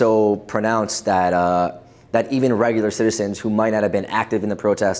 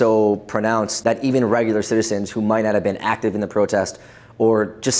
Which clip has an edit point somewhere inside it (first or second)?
second